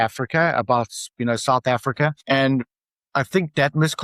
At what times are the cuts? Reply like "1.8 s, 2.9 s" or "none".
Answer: 2.2 s